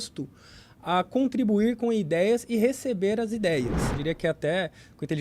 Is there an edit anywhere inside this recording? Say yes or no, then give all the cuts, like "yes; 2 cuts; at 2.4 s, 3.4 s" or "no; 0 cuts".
yes; 1 cut; at 3.9 s